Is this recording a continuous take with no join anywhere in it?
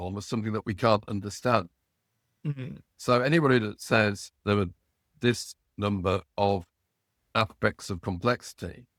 yes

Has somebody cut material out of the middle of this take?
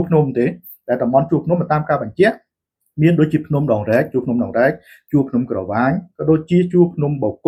no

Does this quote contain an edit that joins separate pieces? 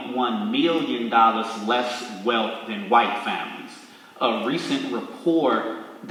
no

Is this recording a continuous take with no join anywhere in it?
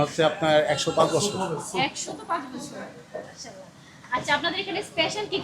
yes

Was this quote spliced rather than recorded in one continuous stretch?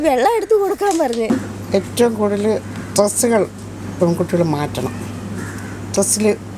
yes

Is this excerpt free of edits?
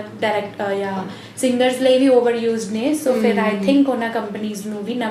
yes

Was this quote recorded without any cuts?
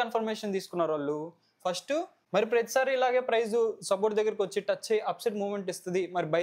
no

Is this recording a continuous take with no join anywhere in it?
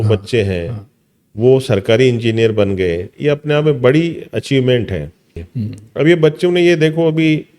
no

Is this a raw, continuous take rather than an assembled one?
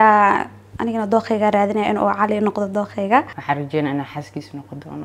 no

